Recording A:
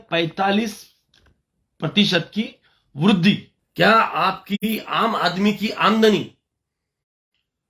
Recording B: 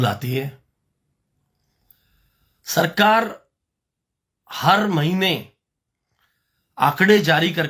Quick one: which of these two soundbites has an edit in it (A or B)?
A